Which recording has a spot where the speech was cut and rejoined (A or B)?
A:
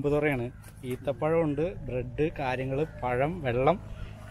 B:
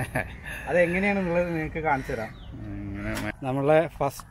B